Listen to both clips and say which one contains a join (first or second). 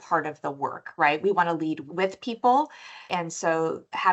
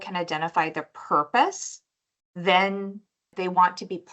first